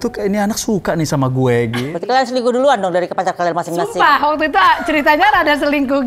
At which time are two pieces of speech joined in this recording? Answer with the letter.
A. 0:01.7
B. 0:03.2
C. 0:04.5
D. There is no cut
A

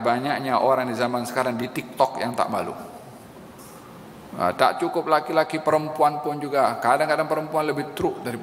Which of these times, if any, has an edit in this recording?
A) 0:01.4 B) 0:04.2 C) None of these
C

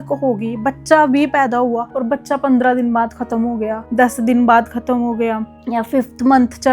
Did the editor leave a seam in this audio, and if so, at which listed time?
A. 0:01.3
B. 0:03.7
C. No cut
C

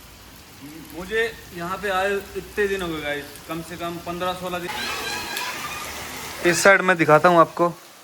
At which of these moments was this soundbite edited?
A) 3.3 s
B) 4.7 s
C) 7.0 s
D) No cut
B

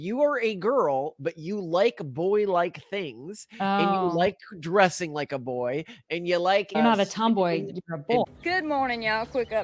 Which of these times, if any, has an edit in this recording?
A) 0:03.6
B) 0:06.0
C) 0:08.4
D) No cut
C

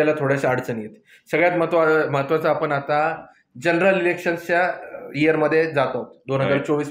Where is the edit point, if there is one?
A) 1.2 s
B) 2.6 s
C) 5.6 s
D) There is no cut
D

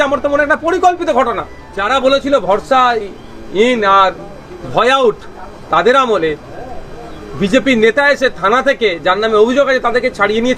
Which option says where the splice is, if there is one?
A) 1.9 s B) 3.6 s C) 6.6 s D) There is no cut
A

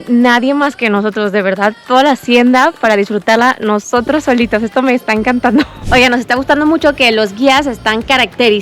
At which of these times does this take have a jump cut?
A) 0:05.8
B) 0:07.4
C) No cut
A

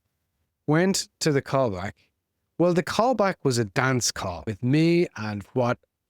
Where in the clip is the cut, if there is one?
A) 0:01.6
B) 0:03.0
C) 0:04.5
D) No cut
C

